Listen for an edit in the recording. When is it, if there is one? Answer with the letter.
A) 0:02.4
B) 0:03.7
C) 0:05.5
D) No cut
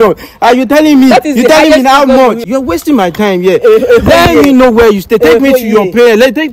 A